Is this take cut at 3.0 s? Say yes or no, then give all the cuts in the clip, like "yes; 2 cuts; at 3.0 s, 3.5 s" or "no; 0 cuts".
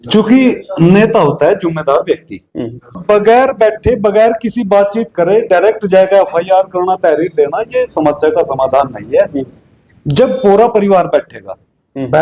yes; 1 cut; at 3.0 s